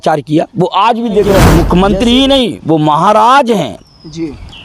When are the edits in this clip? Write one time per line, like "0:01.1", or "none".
0:01.5